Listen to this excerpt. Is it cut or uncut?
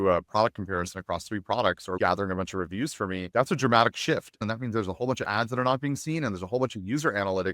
cut